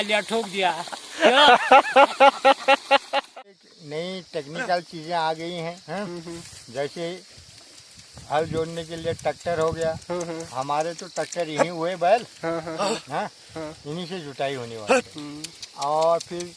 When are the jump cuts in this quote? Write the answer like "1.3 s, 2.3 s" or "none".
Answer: 3.4 s